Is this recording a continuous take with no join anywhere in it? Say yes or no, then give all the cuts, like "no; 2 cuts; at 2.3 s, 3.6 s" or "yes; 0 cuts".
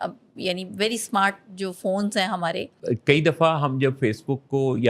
no; 1 cut; at 2.7 s